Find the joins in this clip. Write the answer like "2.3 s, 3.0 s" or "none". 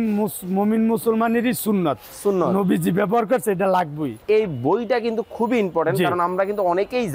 4.2 s